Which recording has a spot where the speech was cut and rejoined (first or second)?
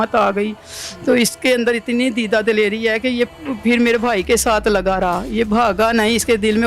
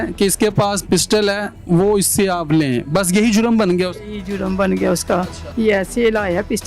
second